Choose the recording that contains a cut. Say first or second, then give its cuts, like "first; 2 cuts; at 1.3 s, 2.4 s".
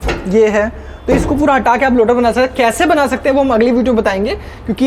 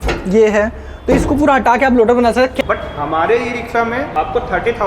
second; 2 cuts; at 2.5 s, 4.1 s